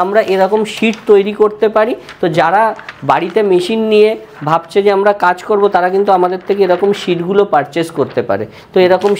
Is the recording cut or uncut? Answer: uncut